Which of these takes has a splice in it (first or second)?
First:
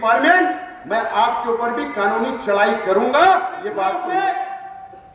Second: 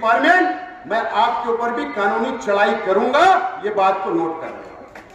first